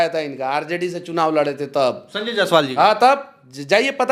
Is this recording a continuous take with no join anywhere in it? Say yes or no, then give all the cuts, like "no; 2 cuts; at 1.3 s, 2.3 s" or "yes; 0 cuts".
yes; 0 cuts